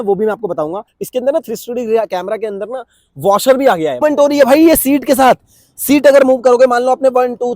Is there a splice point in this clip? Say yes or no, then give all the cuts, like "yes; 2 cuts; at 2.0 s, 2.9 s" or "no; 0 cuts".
yes; 2 cuts; at 0.9 s, 4.0 s